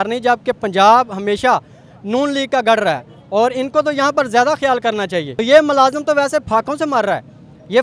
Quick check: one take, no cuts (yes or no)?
no